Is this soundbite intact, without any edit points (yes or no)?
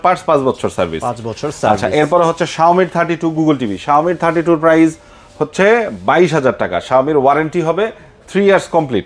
yes